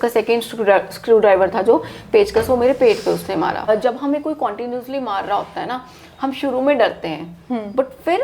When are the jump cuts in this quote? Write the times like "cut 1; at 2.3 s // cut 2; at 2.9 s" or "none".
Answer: cut 1; at 3.7 s